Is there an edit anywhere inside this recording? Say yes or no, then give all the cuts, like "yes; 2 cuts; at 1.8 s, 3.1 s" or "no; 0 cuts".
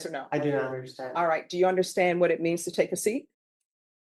no; 0 cuts